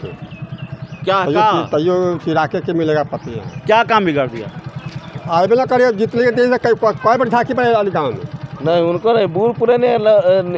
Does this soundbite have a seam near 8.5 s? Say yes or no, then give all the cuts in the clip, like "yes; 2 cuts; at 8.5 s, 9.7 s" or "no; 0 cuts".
yes; 1 cut; at 8.5 s